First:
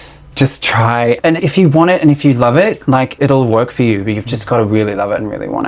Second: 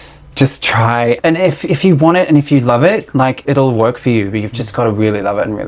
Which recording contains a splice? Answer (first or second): first